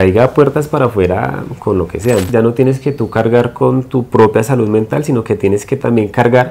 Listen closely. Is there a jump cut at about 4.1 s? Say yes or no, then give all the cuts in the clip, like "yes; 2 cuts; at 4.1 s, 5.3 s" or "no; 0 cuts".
no; 1 cut; at 2.3 s